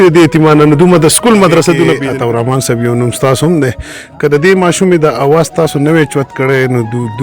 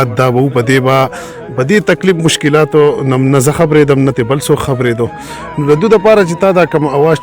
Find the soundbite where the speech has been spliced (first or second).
first